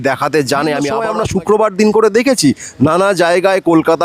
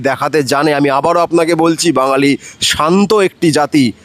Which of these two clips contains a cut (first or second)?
first